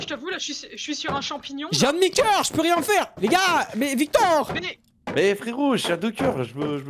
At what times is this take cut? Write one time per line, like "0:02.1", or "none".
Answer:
0:03.1